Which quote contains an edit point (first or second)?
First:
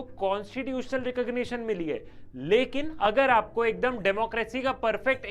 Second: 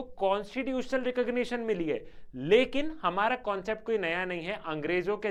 first